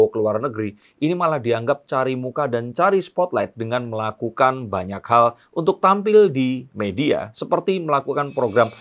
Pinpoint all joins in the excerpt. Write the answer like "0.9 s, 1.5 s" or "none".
none